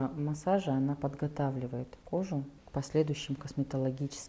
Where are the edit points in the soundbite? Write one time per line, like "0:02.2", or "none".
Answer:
0:02.0
0:02.6